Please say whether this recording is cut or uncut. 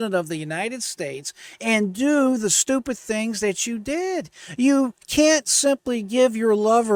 uncut